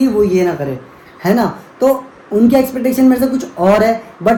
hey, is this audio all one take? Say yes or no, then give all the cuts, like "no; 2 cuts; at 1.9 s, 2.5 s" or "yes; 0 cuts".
yes; 0 cuts